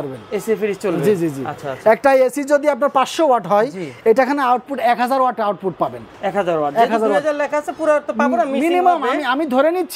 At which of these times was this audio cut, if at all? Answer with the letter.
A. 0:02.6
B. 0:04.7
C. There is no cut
C